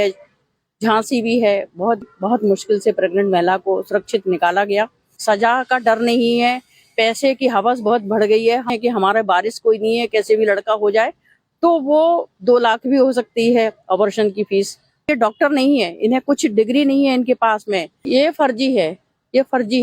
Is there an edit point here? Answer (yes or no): yes